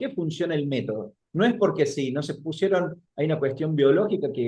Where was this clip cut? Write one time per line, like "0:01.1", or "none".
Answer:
none